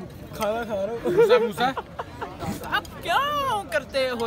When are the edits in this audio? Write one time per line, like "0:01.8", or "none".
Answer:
0:02.3

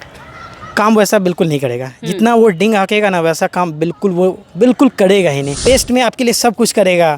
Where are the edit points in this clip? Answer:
0:05.5

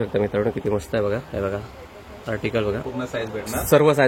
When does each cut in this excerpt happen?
0:02.8

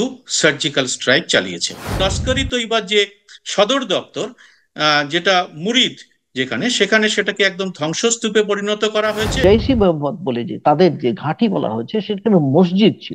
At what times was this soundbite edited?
0:02.0
0:09.4

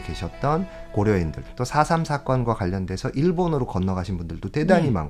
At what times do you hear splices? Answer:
0:01.4

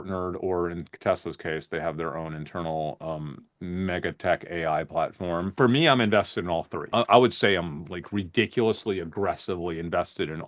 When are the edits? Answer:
0:05.5
0:06.8

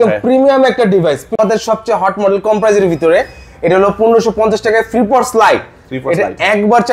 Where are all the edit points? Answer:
0:01.4

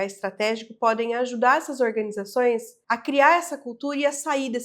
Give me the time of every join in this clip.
0:02.7

